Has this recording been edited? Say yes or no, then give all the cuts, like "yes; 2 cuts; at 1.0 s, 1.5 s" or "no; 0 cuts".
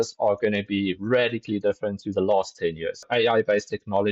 yes; 1 cut; at 3.1 s